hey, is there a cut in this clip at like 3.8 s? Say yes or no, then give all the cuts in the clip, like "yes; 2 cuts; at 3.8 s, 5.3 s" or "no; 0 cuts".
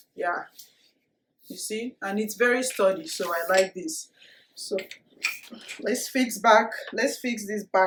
no; 0 cuts